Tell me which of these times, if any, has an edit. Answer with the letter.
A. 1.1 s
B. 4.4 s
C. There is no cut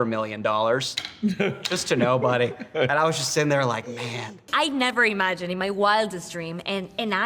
B